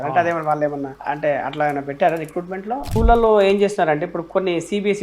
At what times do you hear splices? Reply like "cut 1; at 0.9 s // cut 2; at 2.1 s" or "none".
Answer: cut 1; at 0.9 s // cut 2; at 2.9 s

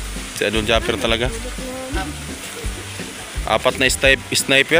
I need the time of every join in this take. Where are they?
none

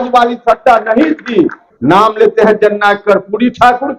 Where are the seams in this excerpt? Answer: cut 1; at 1.6 s

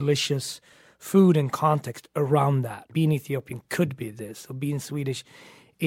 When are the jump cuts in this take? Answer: cut 1; at 2.9 s

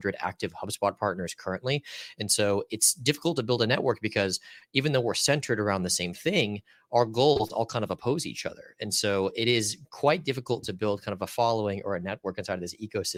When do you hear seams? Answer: none

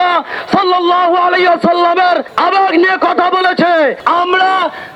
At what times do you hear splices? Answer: cut 1; at 2.3 s // cut 2; at 4.0 s

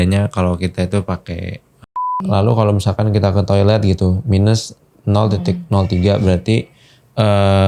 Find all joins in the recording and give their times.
cut 1; at 2.1 s

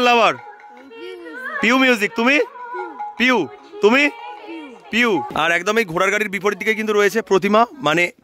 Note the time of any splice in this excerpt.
cut 1; at 5.3 s

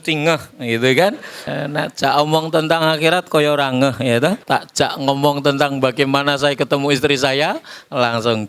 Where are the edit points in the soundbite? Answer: cut 1; at 1.4 s // cut 2; at 4.4 s

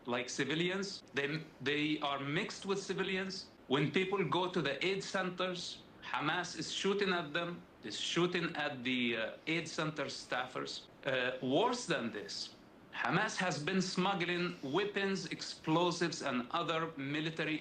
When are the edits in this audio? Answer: cut 1; at 1.0 s // cut 2; at 3.5 s // cut 3; at 10.8 s

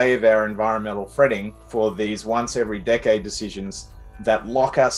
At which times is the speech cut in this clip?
cut 1; at 1.6 s

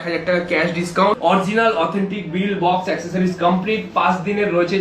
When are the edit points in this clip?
cut 1; at 1.2 s

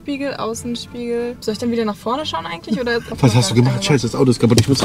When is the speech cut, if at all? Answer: cut 1; at 1.4 s // cut 2; at 3.1 s

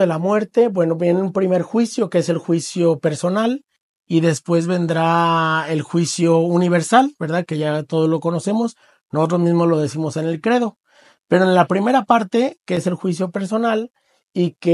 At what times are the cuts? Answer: none

